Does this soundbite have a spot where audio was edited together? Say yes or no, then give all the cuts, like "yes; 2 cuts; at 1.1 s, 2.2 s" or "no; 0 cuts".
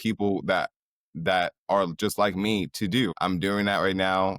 yes; 1 cut; at 3.1 s